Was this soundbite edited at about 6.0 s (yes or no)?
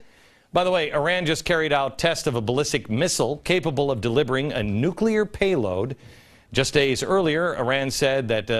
yes